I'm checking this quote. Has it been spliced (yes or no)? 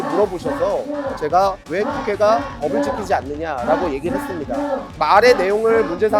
yes